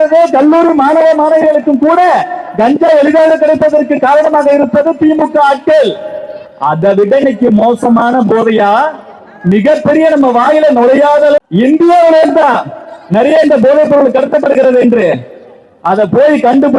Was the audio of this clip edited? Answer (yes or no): yes